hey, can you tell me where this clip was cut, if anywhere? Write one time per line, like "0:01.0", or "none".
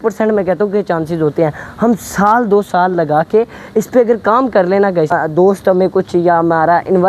0:05.1